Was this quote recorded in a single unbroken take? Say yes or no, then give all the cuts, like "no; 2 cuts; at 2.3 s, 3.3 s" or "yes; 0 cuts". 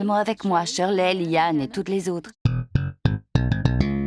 no; 1 cut; at 2.3 s